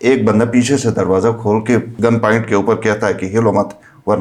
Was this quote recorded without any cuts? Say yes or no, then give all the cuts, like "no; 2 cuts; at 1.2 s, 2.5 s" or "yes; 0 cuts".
no; 1 cut; at 1.9 s